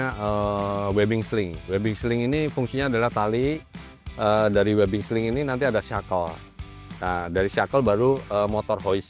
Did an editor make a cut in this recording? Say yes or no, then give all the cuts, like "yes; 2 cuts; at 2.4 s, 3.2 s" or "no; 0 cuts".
no; 0 cuts